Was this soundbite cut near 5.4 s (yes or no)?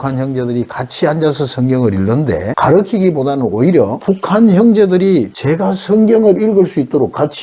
yes